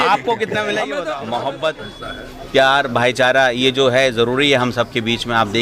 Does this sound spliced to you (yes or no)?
yes